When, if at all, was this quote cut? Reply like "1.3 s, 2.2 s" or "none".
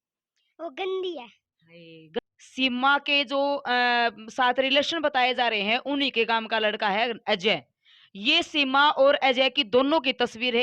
2.2 s